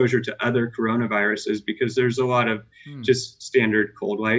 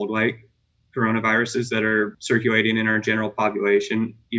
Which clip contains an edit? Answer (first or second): second